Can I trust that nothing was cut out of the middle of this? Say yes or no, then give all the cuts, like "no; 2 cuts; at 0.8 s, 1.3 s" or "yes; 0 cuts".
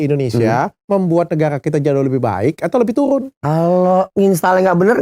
no; 2 cuts; at 3.3 s, 4.1 s